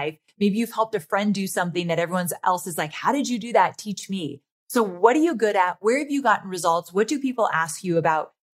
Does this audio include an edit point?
no; 0 cuts

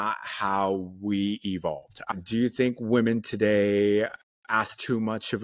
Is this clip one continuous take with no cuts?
no; 1 cut; at 2.0 s

